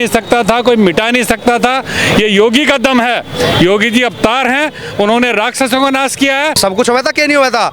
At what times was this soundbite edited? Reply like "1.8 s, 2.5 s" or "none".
6.6 s